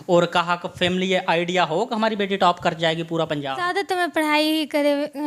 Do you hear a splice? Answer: yes; 1 cut; at 3.6 s

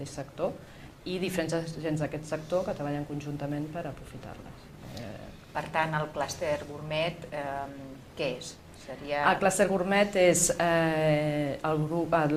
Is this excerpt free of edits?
yes; 0 cuts

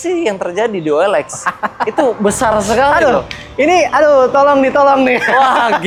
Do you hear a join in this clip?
no; 0 cuts

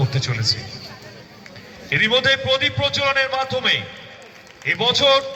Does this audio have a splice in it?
no; 0 cuts

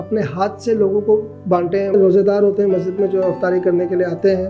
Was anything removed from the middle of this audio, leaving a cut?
yes; 1 cut; at 1.9 s

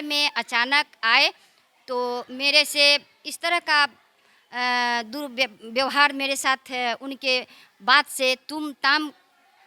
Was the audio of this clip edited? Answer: no; 0 cuts

